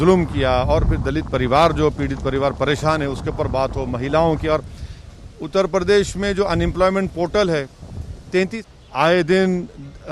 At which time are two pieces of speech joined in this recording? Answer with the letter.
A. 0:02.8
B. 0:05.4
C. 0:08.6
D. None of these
C